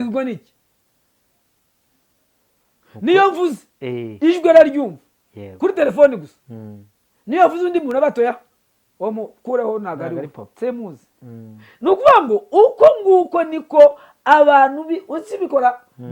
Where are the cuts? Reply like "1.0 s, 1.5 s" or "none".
none